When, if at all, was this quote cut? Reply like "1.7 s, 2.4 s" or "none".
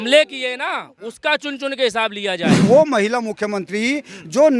2.6 s